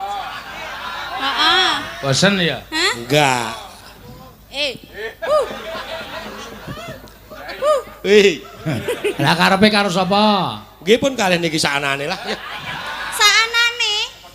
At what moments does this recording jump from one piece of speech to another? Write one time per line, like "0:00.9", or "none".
none

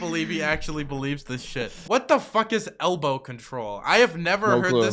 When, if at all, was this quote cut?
0:01.8

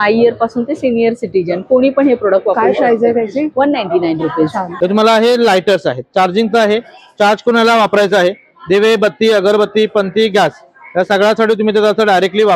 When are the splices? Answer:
0:04.6

